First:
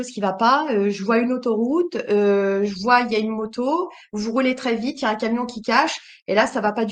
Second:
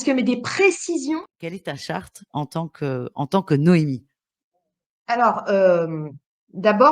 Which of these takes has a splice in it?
second; 1 cut; at 1.2 s

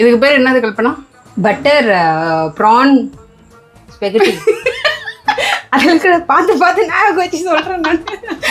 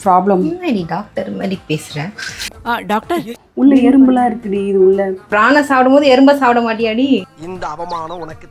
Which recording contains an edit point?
second; 3 cuts; at 3.4 s, 5.3 s, 7.2 s

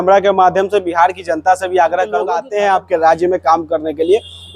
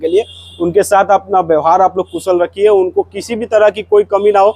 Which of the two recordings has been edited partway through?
first; 1 cut; at 2.4 s

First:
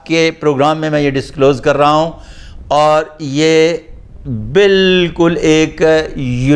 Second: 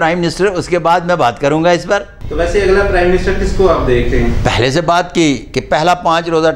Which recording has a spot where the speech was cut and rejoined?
second; 1 cut; at 2.2 s

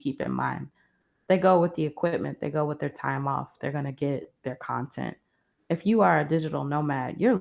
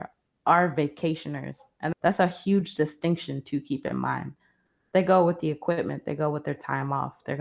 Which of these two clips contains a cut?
second; 1 cut; at 1.9 s

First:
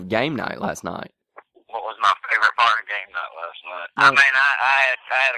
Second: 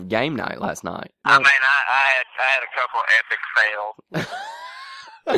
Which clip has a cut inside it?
second; 1 cut; at 1.1 s

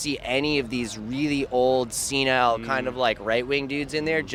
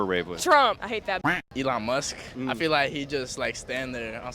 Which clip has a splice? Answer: second; 2 cuts; at 1.4 s, 2.2 s

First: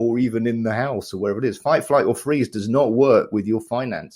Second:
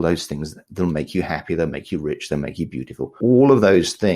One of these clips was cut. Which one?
second; 1 cut; at 3.1 s

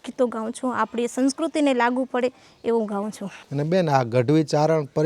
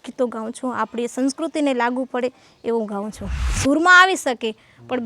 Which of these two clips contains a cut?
second; 1 cut; at 3.4 s

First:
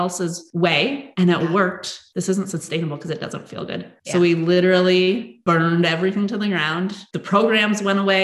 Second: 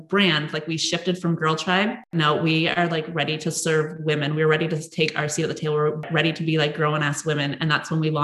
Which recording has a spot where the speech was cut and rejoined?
second; 1 cut; at 6.0 s

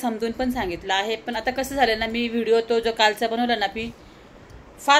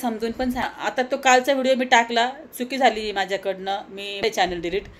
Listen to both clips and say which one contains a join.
second; 2 cuts; at 0.9 s, 4.2 s

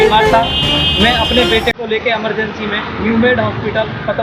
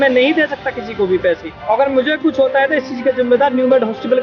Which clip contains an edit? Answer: second; 1 cut; at 1.5 s

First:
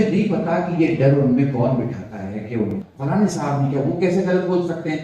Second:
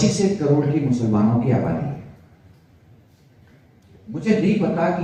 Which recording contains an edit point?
first; 1 cut; at 2.7 s

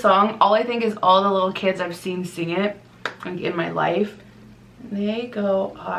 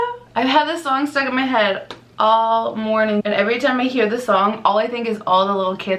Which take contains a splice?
second; 1 cut; at 3.2 s

